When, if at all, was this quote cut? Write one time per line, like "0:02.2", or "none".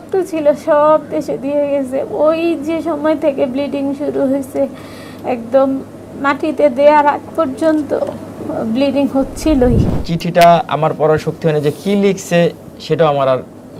0:10.0